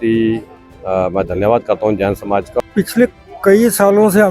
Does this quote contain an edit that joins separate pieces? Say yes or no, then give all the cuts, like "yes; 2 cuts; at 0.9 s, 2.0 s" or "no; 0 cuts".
yes; 1 cut; at 2.5 s